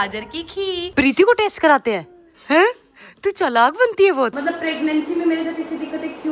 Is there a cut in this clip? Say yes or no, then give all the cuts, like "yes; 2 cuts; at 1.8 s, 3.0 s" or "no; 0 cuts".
yes; 2 cuts; at 0.9 s, 4.4 s